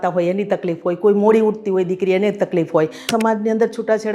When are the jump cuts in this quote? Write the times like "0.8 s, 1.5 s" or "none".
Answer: 3.1 s